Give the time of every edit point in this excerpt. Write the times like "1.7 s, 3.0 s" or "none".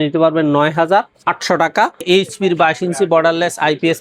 2.0 s